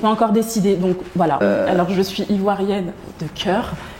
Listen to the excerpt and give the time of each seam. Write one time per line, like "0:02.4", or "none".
0:01.4